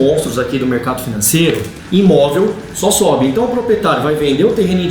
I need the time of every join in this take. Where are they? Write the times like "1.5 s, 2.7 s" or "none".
1.7 s